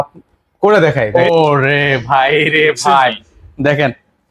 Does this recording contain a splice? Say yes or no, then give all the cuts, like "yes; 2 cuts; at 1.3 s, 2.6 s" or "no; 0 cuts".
yes; 1 cut; at 1.1 s